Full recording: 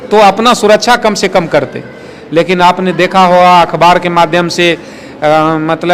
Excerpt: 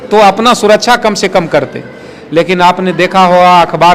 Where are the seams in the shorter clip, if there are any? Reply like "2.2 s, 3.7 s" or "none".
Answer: none